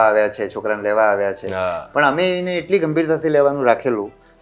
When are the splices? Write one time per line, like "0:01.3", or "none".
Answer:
none